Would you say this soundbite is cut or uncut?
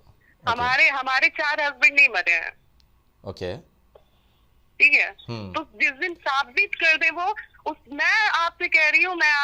uncut